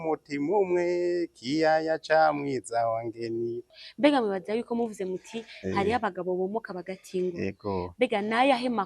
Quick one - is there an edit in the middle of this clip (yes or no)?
yes